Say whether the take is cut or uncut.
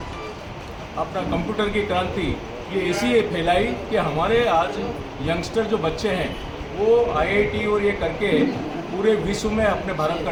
uncut